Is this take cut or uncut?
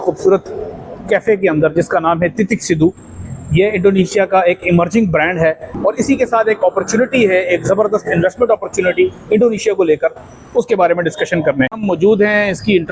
cut